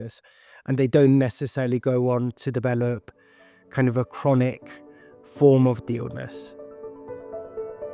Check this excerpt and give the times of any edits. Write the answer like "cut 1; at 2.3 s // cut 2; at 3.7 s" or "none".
cut 1; at 6.3 s